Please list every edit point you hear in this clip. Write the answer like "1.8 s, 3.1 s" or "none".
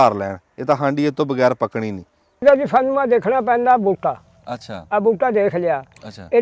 2.4 s